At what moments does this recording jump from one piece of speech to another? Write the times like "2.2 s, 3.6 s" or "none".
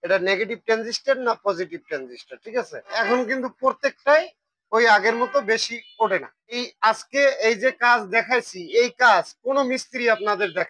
2.9 s, 6.7 s